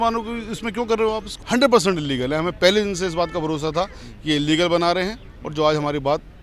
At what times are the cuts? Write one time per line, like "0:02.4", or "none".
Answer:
0:01.3